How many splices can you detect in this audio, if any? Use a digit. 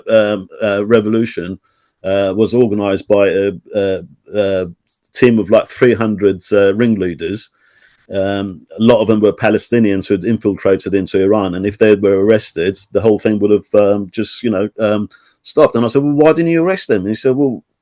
0